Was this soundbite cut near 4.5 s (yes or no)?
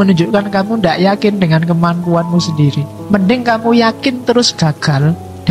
no